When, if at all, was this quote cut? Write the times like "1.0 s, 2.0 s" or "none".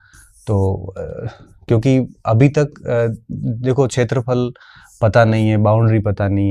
none